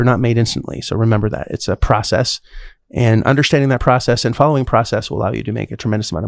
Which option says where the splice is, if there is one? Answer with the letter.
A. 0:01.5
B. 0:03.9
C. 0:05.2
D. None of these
A